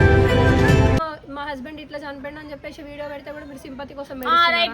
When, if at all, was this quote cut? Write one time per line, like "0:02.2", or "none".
0:01.0